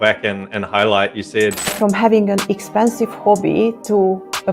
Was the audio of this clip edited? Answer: yes; 1 cut; at 1.6 s

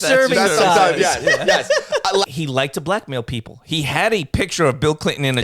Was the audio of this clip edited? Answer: yes; 1 cut; at 2.3 s

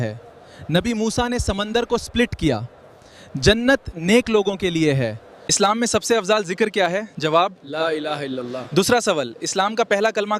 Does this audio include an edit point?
no; 0 cuts

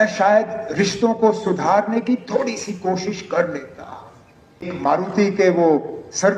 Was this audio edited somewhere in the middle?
yes; 1 cut; at 4.7 s

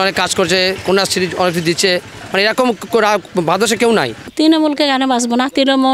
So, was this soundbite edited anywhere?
yes; 1 cut; at 4.2 s

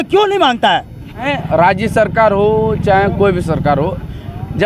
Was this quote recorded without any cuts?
no; 1 cut; at 1.3 s

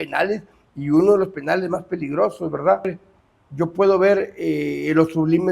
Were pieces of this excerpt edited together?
yes; 1 cut; at 2.9 s

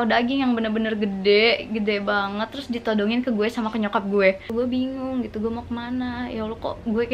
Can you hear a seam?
yes; 1 cut; at 4.5 s

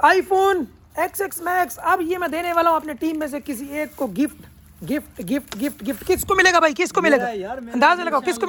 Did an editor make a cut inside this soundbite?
no; 0 cuts

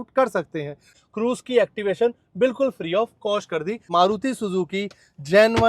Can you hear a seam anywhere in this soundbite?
yes; 2 cuts; at 0.9 s, 3.9 s

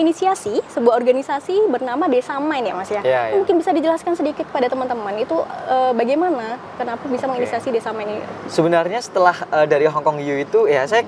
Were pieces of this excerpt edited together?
no; 0 cuts

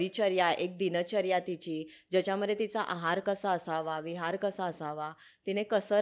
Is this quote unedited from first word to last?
yes; 0 cuts

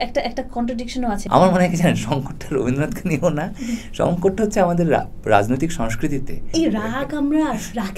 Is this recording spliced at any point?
yes; 2 cuts; at 1.2 s, 6.5 s

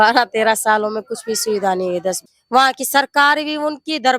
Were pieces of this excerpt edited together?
yes; 1 cut; at 2.2 s

